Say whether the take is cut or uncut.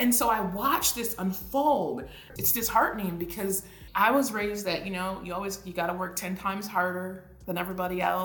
cut